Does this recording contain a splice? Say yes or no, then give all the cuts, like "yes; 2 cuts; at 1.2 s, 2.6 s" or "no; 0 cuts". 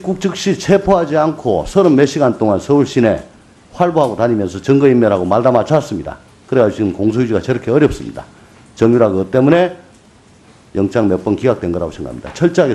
yes; 1 cut; at 2.5 s